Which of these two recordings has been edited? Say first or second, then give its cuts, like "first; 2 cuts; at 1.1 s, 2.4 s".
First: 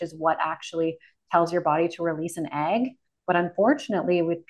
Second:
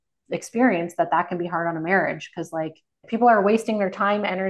second; 1 cut; at 3.0 s